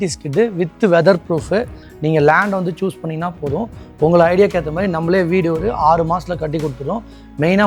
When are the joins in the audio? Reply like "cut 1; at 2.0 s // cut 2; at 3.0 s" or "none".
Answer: cut 1; at 1.8 s